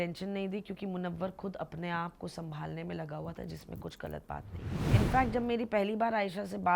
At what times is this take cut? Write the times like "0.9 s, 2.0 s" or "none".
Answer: 4.7 s